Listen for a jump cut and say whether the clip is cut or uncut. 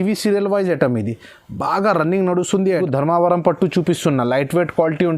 cut